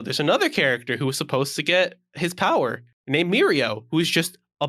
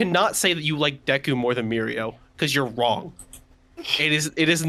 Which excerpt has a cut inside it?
first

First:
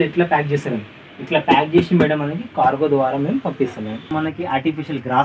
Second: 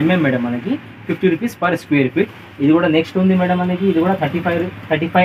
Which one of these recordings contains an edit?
first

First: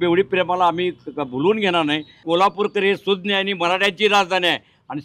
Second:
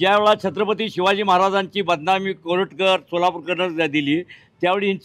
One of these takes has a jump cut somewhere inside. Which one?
first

